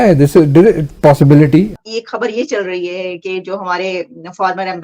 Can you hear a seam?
yes; 1 cut; at 1.9 s

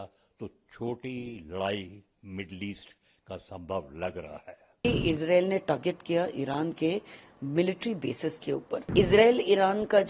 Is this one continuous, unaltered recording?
no; 2 cuts; at 4.7 s, 8.9 s

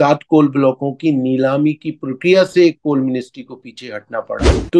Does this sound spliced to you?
no; 0 cuts

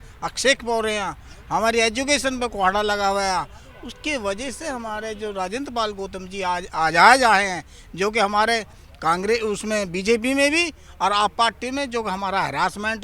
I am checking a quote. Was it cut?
no; 0 cuts

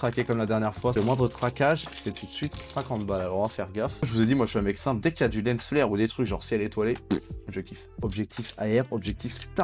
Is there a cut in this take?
yes; 3 cuts; at 0.9 s, 4.1 s, 8.0 s

